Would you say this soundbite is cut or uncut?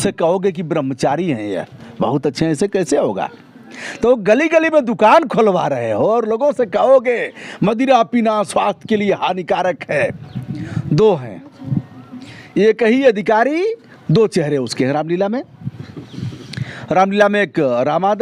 uncut